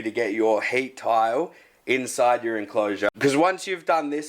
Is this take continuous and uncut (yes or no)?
no